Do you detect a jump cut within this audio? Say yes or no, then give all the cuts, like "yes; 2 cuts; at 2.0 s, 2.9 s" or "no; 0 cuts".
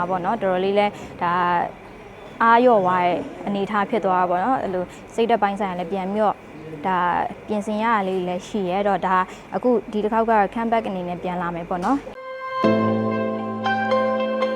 yes; 1 cut; at 12.1 s